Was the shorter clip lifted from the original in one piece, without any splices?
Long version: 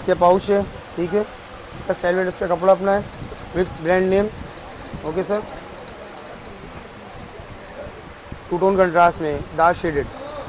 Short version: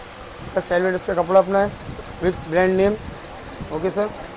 yes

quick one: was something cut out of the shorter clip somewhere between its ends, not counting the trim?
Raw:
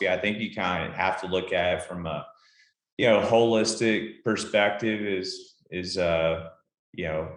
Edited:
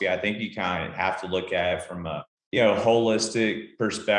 yes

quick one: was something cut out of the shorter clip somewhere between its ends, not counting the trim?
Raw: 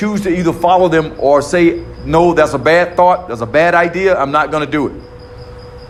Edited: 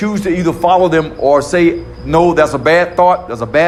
no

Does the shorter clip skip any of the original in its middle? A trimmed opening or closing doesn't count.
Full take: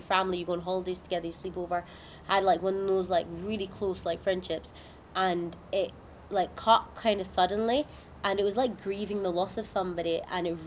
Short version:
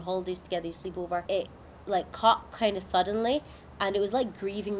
yes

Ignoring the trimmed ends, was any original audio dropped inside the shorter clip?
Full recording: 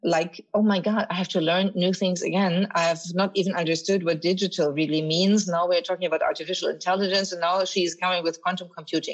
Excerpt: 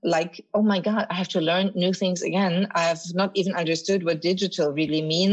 no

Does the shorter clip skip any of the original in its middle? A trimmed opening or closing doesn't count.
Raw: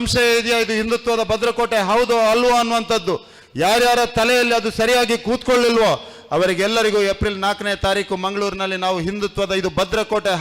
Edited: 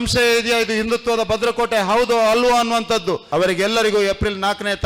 yes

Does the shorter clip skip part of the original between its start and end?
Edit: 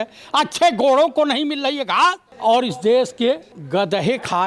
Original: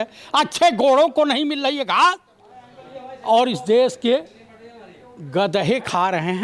yes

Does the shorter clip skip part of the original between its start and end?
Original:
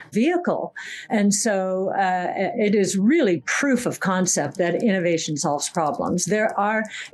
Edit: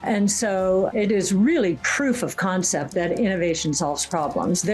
yes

